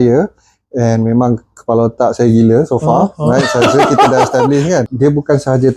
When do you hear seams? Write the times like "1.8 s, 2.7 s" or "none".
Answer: 4.8 s